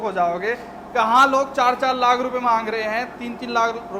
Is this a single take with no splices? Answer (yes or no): yes